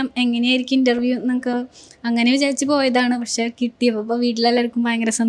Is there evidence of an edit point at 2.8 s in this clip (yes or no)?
no